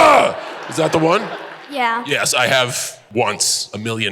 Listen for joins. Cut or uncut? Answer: cut